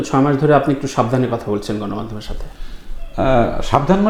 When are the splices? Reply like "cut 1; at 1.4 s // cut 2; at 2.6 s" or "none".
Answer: none